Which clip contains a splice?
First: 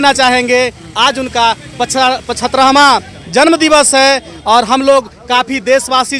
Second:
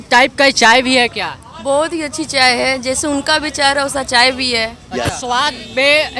second; 1 cut; at 5.2 s

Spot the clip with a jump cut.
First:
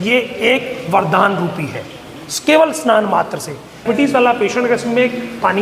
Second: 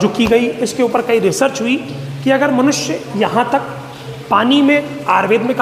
first; 1 cut; at 3.8 s

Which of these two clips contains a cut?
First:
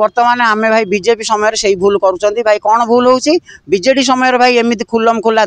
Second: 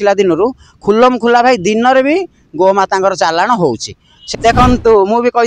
second; 1 cut; at 4.2 s

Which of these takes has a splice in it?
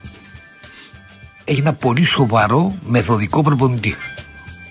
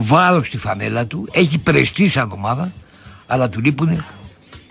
first; 1 cut; at 1.5 s

